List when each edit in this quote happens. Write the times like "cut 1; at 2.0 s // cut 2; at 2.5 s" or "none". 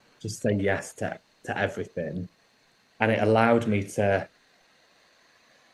none

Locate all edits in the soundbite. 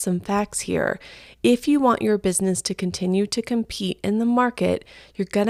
none

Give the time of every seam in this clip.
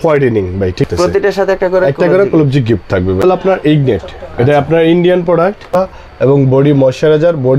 cut 1; at 0.8 s // cut 2; at 3.2 s // cut 3; at 5.7 s

